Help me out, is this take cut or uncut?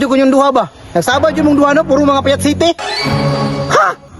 uncut